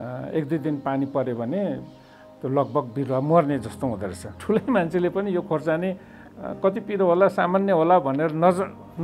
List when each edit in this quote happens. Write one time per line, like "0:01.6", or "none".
0:04.4